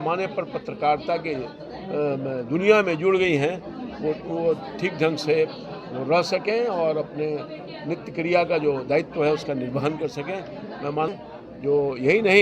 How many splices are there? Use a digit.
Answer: 1